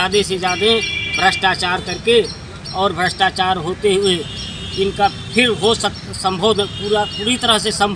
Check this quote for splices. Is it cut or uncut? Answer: uncut